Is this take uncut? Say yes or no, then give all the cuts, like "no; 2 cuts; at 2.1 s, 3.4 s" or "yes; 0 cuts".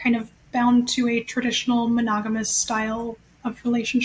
yes; 0 cuts